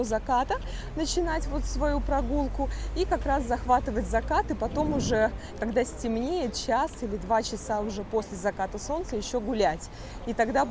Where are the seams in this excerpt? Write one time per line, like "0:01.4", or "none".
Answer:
none